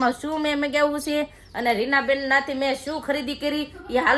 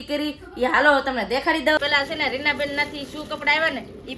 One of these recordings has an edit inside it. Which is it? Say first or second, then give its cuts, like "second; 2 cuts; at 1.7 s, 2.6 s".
second; 1 cut; at 1.8 s